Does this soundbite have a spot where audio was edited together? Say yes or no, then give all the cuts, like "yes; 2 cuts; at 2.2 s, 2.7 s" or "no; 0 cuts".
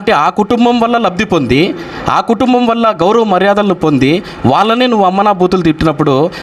no; 0 cuts